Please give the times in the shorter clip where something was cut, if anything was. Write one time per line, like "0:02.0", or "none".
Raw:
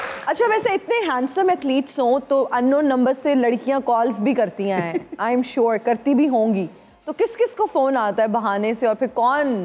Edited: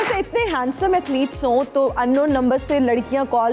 none